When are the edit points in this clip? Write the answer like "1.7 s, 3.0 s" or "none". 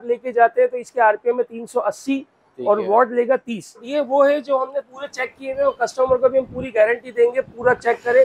3.9 s